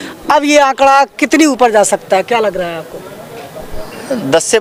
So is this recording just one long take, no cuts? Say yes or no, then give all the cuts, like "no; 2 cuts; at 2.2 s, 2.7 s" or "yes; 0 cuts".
yes; 0 cuts